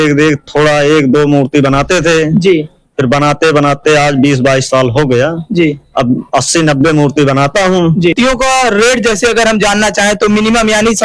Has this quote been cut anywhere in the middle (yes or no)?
yes